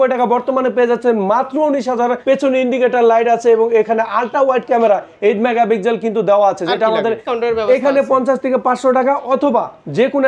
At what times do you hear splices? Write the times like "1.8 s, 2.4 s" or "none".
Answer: 2.2 s, 7.3 s